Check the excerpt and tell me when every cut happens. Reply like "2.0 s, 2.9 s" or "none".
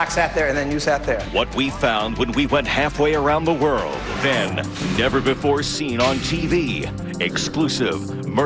none